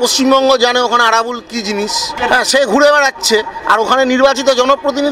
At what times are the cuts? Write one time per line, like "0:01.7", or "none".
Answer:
0:02.1